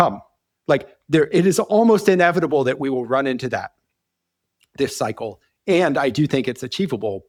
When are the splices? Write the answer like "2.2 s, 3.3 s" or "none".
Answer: none